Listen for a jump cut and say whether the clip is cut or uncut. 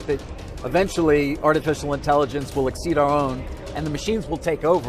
uncut